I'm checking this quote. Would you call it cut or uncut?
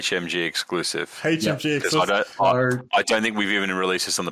uncut